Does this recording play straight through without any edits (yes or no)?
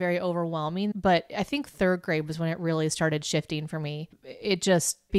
no